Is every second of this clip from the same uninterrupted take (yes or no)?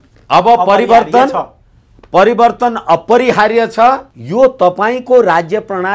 no